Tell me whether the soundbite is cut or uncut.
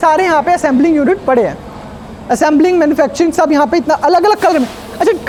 uncut